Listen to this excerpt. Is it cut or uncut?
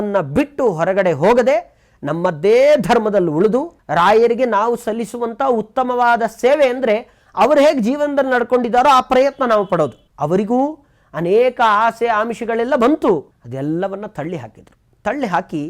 cut